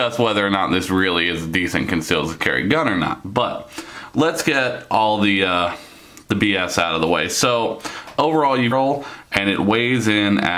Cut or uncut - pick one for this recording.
uncut